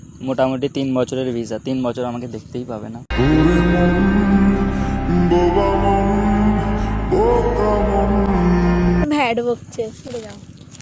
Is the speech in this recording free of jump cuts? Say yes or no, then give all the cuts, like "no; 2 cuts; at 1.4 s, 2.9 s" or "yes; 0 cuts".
yes; 0 cuts